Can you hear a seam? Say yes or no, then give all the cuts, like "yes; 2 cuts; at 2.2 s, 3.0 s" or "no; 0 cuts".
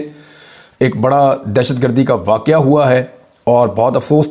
no; 0 cuts